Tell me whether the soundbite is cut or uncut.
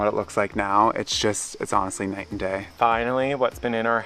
cut